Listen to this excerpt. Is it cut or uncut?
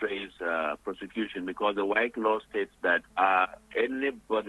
uncut